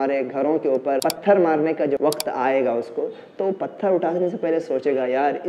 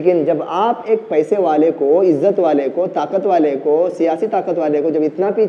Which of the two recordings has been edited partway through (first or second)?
first